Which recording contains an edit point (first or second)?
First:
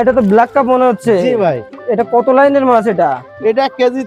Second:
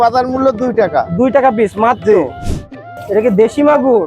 second